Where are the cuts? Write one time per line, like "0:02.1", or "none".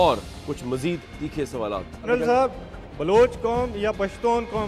0:02.1